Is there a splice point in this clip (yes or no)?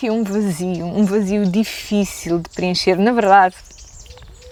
no